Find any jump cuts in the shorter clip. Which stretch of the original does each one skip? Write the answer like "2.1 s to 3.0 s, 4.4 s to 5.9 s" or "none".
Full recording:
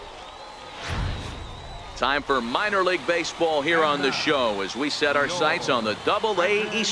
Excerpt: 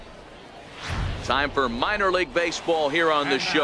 1.2 s to 1.9 s